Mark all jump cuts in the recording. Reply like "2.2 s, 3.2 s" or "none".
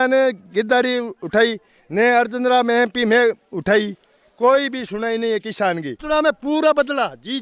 5.9 s